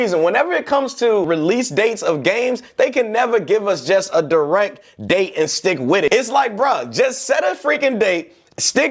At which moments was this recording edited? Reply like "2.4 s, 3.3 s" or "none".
1.3 s, 6.1 s